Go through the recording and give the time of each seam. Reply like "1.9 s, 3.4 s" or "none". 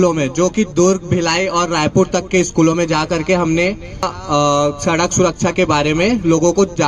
4.1 s